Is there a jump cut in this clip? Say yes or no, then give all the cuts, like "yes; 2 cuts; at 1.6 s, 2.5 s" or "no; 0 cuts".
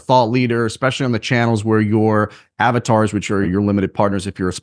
yes; 1 cut; at 3.5 s